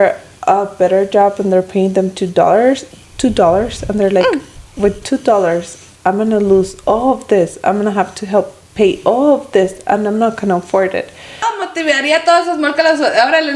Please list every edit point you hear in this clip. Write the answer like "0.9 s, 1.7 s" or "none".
11.4 s